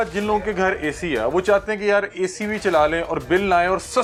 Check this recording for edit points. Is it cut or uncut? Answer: uncut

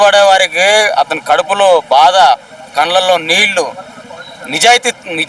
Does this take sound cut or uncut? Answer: uncut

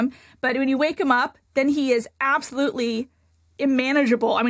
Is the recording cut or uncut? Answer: cut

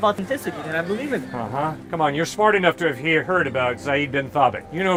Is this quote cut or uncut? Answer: uncut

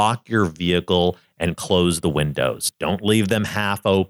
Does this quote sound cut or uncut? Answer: uncut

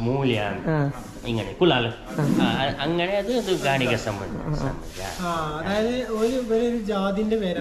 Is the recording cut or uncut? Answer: uncut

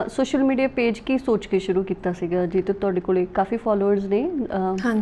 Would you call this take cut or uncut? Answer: uncut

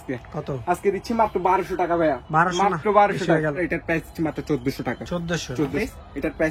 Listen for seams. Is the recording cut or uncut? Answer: uncut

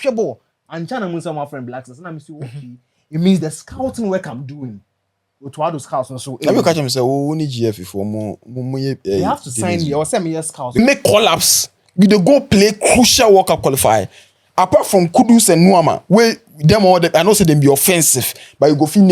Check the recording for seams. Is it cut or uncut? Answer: cut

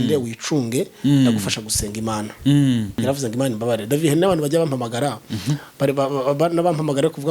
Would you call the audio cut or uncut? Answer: cut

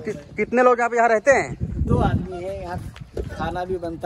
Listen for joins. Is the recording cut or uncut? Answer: uncut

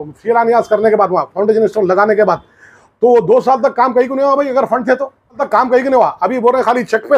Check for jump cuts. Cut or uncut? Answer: cut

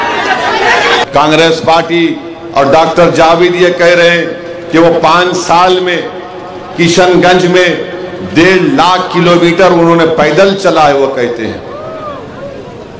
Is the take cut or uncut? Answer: cut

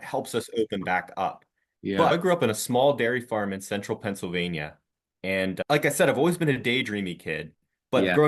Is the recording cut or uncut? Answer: cut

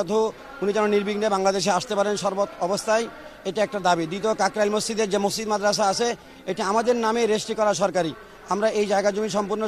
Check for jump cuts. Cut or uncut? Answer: uncut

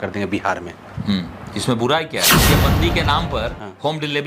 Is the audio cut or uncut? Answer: cut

